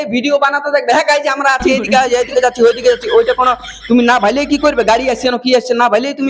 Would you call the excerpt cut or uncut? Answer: uncut